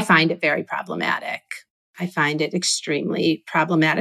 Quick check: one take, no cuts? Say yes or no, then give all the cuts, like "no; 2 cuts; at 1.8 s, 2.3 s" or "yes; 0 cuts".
yes; 0 cuts